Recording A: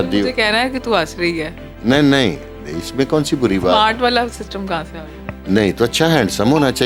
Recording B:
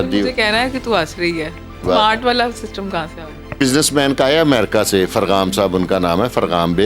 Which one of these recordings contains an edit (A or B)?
B